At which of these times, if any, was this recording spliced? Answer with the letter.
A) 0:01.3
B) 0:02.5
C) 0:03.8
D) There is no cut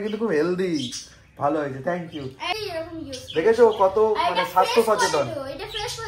B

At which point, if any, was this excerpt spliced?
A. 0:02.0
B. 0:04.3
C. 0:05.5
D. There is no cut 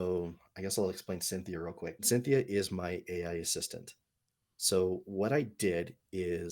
A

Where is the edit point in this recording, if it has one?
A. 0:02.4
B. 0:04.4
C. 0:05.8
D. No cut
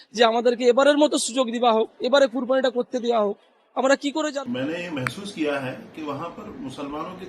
B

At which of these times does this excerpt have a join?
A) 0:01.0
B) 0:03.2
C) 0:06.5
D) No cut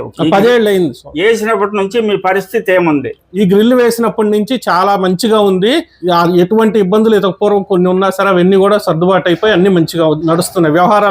B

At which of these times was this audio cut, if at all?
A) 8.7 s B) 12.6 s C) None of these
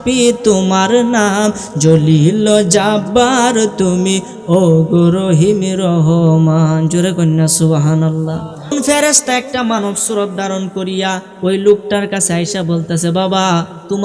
A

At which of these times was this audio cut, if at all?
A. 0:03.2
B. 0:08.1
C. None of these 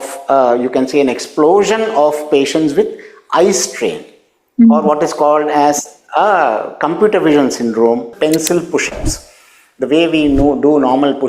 B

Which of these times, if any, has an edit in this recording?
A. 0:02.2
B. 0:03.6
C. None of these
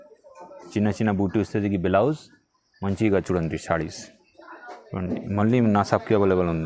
C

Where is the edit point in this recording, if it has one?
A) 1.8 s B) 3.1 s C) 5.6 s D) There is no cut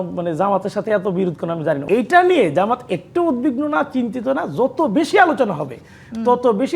A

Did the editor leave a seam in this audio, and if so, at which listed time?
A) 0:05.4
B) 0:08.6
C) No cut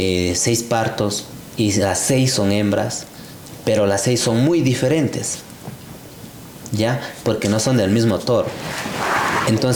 C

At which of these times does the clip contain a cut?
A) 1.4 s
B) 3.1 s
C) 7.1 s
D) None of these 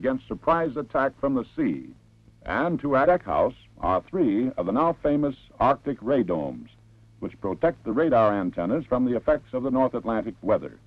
D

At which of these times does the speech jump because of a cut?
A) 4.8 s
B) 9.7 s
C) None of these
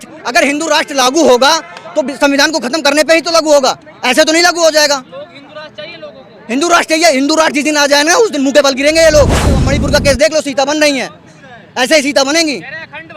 B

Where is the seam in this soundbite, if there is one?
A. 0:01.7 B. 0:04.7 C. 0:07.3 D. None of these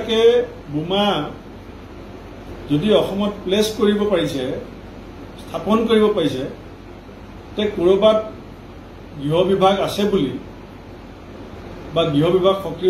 D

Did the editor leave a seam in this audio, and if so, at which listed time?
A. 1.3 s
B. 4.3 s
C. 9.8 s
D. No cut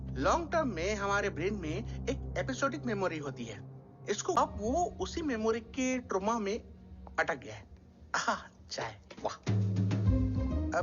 B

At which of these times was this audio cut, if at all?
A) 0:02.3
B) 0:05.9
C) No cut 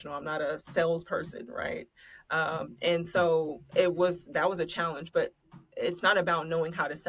C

